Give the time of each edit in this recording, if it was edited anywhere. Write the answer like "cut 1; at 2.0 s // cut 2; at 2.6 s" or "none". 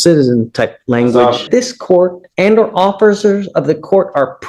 cut 1; at 1.4 s